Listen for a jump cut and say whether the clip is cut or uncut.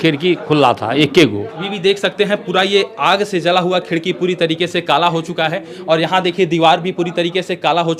cut